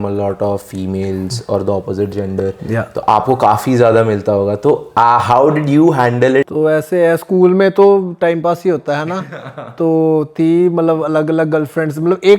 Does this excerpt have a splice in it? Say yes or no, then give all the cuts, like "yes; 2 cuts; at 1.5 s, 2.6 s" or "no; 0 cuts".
yes; 2 cuts; at 4.9 s, 6.5 s